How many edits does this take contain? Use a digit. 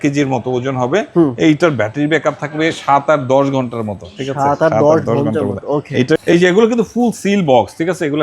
1